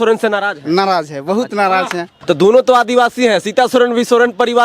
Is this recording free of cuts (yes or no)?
no